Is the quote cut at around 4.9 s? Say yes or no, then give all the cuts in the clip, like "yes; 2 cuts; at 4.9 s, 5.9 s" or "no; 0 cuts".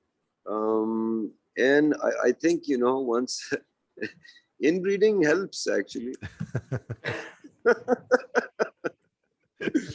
no; 0 cuts